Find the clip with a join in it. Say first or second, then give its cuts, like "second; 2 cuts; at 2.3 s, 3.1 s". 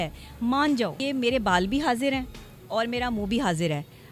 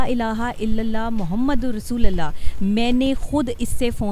first; 1 cut; at 1.0 s